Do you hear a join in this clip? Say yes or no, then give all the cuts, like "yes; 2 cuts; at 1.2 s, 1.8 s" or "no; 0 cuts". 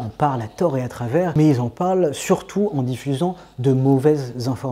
no; 0 cuts